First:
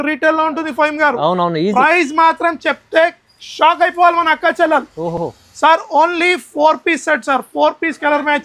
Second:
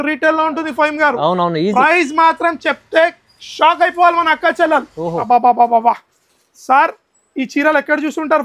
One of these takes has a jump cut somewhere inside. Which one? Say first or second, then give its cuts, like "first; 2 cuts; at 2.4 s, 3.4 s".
second; 1 cut; at 5.2 s